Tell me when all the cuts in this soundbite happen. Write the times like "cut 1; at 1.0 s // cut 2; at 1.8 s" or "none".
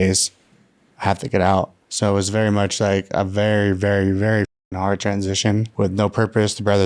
cut 1; at 1.8 s // cut 2; at 5.7 s